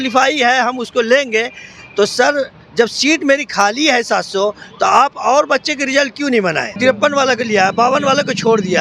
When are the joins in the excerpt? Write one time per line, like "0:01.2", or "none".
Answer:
0:06.7

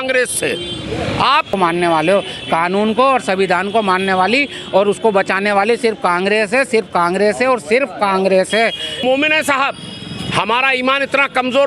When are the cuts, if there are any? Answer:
0:01.6
0:09.0

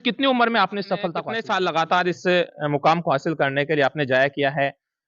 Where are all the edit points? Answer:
0:01.3

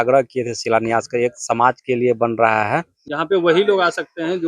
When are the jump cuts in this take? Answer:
0:03.0

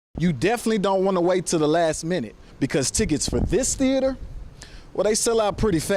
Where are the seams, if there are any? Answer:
none

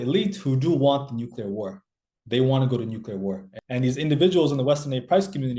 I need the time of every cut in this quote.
0:03.5

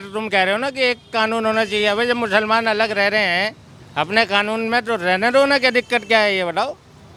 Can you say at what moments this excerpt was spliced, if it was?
none

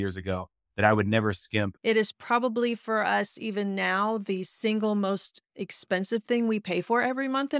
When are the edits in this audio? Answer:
0:01.7

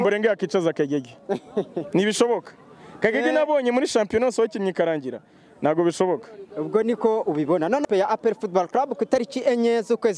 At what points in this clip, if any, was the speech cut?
0:07.9

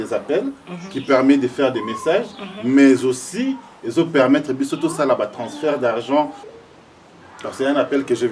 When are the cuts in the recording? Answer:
0:06.4

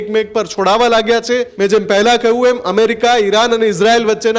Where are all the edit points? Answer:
0:01.5

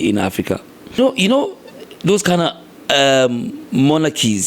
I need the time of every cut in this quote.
0:01.0

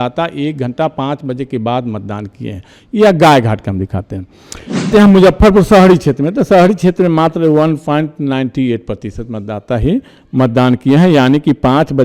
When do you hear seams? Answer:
0:04.9

